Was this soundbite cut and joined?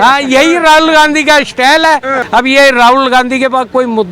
yes; 1 cut; at 2.2 s

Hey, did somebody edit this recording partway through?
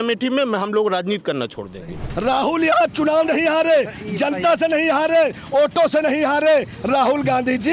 yes; 1 cut; at 2.0 s

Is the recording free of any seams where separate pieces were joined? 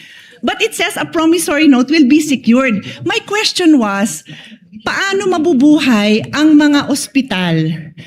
yes; 0 cuts

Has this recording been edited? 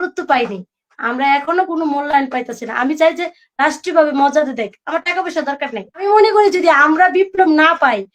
yes; 1 cut; at 6.0 s

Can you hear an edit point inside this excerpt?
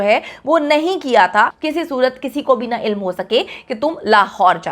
yes; 1 cut; at 1.6 s

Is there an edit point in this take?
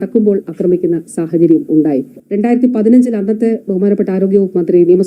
yes; 1 cut; at 2.2 s

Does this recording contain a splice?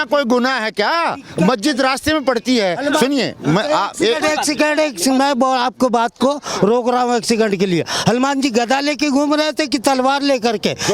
no; 0 cuts

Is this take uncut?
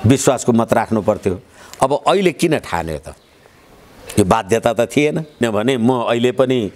yes; 0 cuts

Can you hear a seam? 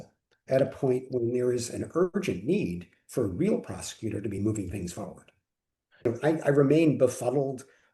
yes; 1 cut; at 6.0 s

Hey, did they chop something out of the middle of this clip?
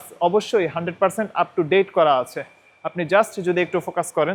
no; 0 cuts

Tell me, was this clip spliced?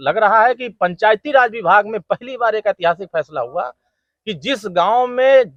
no; 0 cuts

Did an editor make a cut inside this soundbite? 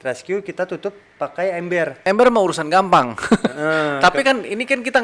yes; 1 cut; at 2.0 s

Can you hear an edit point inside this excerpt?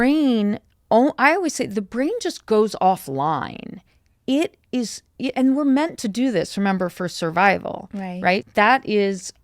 yes; 1 cut; at 8.5 s

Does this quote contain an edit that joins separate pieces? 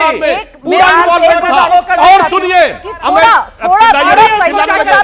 no; 0 cuts

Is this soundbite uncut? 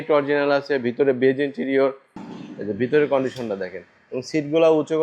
no; 1 cut; at 2.1 s

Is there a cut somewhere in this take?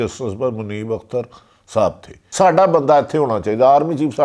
yes; 1 cut; at 2.2 s

